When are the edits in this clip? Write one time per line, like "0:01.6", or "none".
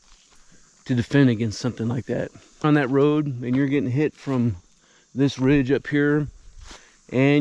0:02.6